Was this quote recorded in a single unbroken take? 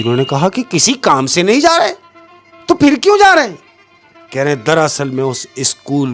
yes; 0 cuts

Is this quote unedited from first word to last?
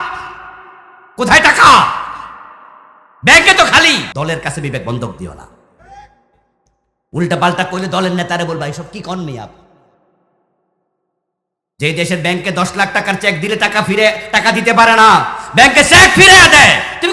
no; 1 cut; at 4.1 s

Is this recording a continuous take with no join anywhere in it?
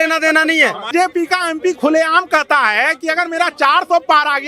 no; 1 cut; at 0.9 s

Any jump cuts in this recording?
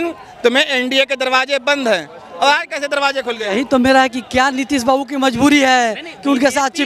no; 0 cuts

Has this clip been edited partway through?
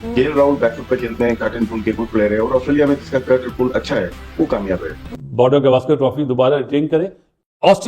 yes; 1 cut; at 5.0 s

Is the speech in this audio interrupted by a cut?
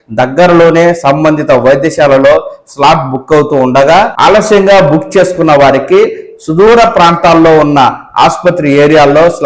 yes; 1 cut; at 4.1 s

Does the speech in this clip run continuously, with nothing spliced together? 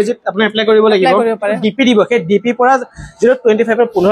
no; 1 cut; at 1.6 s

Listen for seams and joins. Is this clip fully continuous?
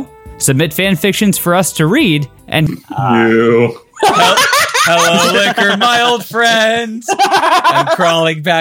no; 1 cut; at 2.7 s

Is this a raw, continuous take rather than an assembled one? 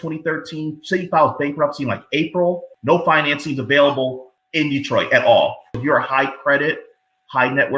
no; 2 cuts; at 2.7 s, 5.6 s

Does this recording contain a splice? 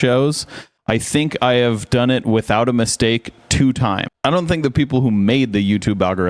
yes; 1 cut; at 4.1 s

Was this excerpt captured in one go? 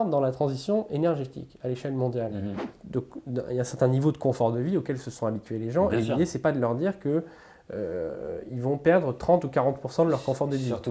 no; 1 cut; at 2.8 s

